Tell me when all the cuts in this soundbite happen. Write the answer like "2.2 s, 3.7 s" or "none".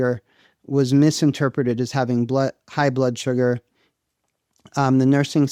none